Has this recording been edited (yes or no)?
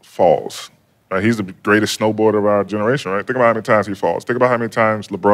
no